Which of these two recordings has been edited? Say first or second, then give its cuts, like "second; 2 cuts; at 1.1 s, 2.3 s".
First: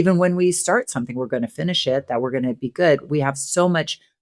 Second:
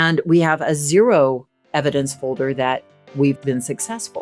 second; 1 cut; at 3.2 s